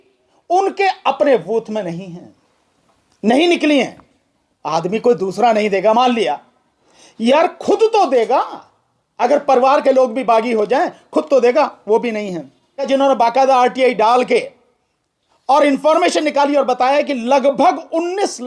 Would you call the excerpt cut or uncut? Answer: cut